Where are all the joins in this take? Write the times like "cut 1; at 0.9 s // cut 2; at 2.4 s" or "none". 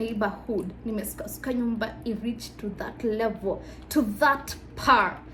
none